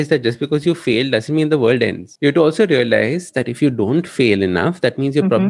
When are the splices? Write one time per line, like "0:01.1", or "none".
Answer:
0:02.0